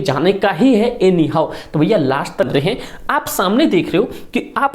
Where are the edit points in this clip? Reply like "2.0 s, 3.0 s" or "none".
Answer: 2.5 s